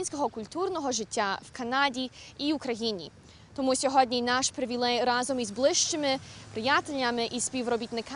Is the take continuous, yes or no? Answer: no